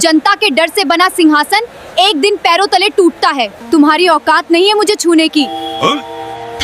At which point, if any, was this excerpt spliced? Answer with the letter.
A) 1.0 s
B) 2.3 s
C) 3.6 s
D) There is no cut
C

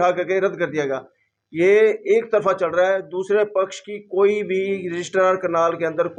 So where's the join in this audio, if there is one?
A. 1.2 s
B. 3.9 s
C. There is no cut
C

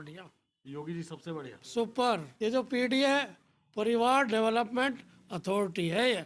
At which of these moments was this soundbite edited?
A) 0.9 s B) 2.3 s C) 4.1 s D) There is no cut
B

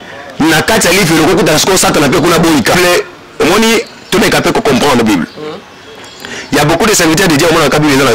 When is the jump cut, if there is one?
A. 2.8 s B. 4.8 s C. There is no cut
A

